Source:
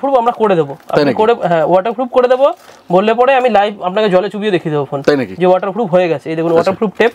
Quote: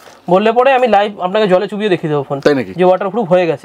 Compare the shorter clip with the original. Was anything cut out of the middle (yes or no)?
no